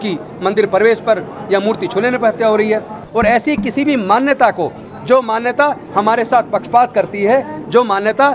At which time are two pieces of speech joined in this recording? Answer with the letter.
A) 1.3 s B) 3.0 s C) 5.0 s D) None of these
B